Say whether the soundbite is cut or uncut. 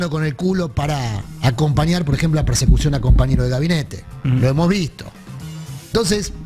uncut